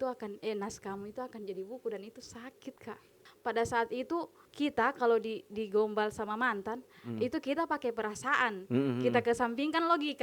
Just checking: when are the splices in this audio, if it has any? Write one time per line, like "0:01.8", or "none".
0:03.2
0:04.4